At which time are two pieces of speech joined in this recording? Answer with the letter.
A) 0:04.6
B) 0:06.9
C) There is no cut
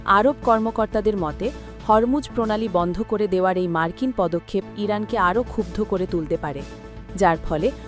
C